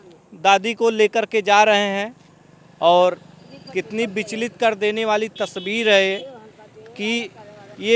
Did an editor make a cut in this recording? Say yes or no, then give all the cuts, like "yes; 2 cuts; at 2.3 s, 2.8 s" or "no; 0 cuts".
no; 0 cuts